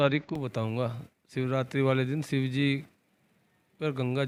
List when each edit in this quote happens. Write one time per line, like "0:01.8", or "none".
none